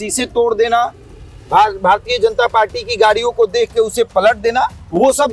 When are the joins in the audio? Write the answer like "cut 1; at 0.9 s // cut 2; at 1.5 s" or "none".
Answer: none